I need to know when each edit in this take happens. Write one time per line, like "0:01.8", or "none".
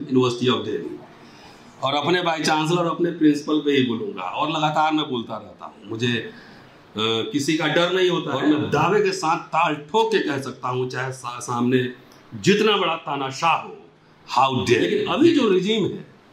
0:08.3
0:14.9